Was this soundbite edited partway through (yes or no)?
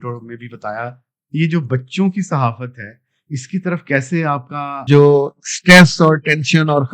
yes